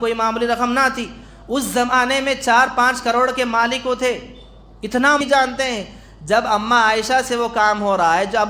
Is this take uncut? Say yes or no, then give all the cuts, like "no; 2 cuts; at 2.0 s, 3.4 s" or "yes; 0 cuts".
no; 1 cut; at 5.2 s